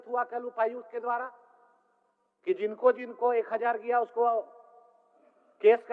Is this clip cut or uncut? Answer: uncut